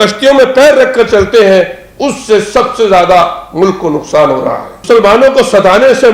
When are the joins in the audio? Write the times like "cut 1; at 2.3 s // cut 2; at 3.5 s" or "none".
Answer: cut 1; at 4.7 s